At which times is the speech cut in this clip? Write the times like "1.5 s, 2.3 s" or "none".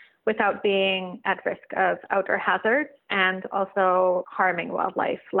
3.0 s, 4.3 s

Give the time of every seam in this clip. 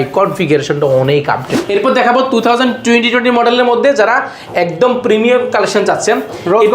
1.6 s

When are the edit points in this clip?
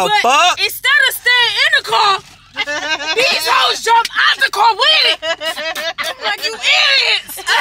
none

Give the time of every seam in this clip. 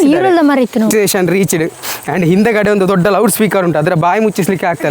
0.9 s

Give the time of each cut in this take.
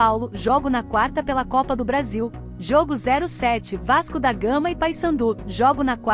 2.4 s

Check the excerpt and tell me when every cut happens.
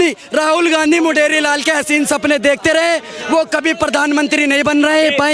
none

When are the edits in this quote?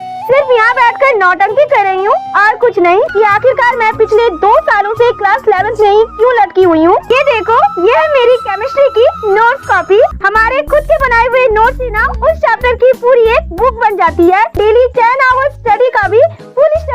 3.1 s, 7.1 s, 10.2 s, 14.5 s

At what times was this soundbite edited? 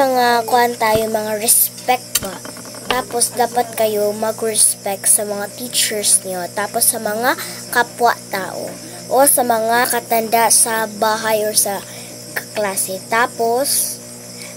9.8 s

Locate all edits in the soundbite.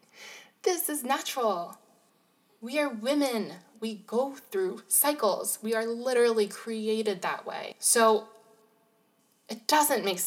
7.7 s

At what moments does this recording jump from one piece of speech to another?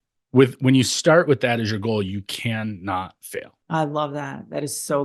3.6 s

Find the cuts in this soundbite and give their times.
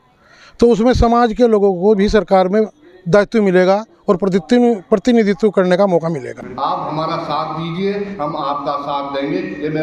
6.3 s

